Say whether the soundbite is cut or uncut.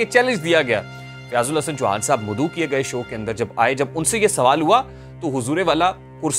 uncut